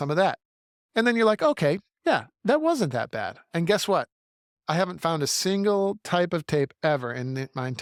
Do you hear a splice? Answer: no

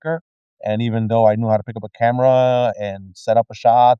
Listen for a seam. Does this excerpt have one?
no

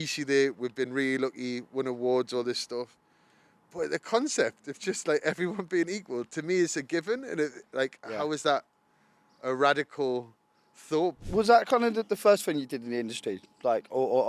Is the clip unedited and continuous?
no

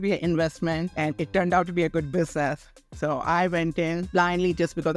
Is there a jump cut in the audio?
yes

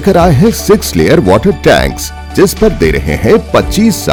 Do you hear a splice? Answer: no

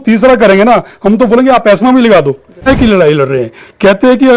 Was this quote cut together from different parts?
yes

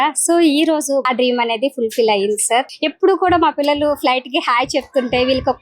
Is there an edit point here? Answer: yes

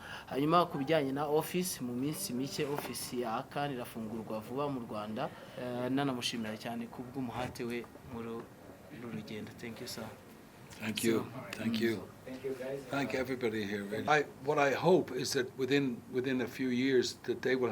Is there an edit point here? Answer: yes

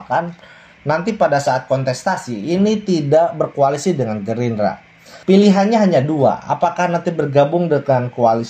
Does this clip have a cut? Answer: yes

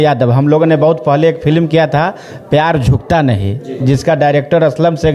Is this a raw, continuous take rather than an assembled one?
yes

